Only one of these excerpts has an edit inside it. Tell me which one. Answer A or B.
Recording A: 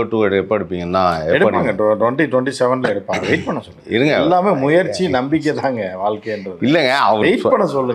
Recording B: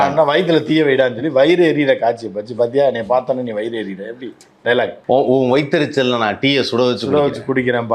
B